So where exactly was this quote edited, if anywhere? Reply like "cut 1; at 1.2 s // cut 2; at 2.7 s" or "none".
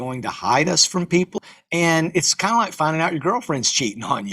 cut 1; at 1.3 s